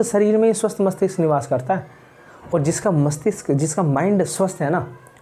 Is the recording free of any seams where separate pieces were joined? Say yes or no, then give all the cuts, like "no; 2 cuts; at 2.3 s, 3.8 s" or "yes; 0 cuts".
yes; 0 cuts